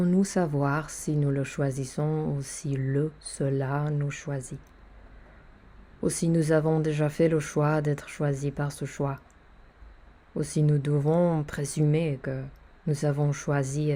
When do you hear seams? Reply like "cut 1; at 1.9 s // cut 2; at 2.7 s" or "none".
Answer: none